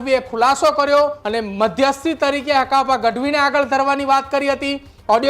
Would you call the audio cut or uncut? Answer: cut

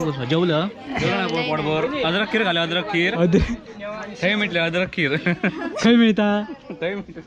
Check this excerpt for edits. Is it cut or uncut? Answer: uncut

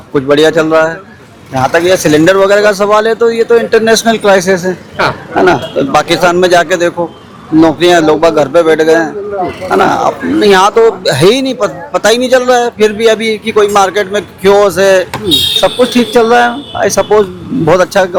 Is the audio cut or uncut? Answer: uncut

